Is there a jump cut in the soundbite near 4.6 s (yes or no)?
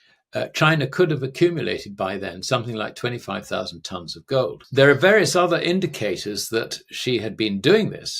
yes